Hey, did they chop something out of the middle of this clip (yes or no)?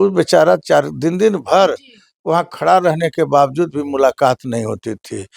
no